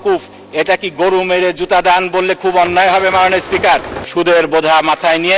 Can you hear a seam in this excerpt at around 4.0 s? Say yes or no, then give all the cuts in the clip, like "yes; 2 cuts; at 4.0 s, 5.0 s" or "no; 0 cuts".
yes; 1 cut; at 4.0 s